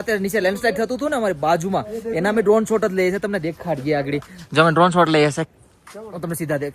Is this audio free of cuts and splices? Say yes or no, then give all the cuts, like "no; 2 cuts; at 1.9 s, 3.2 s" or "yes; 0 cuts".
yes; 0 cuts